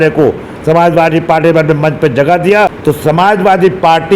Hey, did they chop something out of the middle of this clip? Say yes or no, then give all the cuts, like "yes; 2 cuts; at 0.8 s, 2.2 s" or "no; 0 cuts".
yes; 1 cut; at 2.8 s